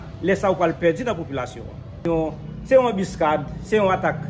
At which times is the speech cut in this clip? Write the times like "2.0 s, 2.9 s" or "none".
2.0 s